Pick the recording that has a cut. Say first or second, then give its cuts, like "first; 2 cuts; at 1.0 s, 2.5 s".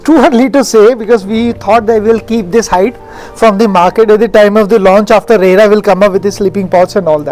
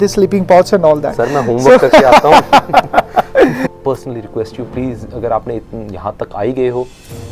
second; 1 cut; at 3.7 s